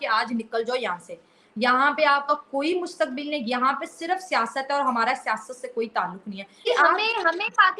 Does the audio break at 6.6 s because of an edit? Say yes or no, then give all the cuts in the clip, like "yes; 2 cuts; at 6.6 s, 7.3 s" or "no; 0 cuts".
yes; 1 cut; at 6.6 s